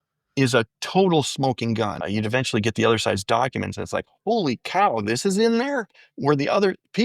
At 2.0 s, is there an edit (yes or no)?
yes